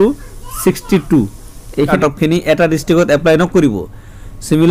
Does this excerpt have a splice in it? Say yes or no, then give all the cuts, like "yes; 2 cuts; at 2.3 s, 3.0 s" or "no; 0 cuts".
yes; 1 cut; at 2.0 s